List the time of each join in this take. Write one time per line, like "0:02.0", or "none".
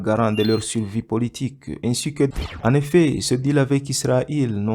0:02.3